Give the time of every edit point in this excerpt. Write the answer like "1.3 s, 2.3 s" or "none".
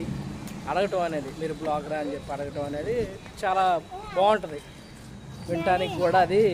none